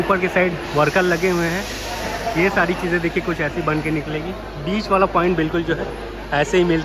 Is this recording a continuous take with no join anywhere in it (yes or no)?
yes